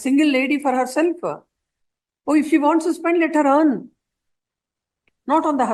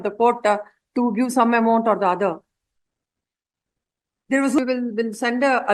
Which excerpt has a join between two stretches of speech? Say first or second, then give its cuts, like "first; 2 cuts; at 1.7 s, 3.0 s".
second; 1 cut; at 4.6 s